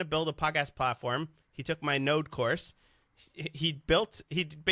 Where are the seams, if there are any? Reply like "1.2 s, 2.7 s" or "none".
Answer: none